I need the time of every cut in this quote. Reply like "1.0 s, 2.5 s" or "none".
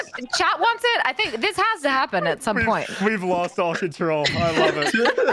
none